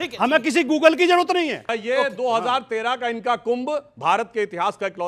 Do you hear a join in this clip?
yes; 1 cut; at 1.6 s

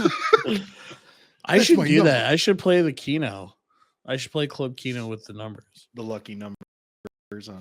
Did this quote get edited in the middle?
no; 0 cuts

